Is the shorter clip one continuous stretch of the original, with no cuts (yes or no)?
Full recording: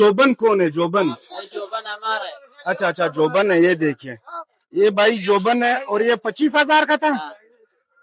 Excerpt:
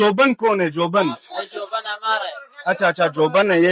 yes